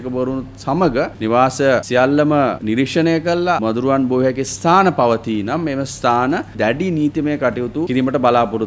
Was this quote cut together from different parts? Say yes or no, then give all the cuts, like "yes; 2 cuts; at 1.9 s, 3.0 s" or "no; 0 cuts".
yes; 5 cuts; at 1.1 s, 1.9 s, 2.6 s, 3.6 s, 6.5 s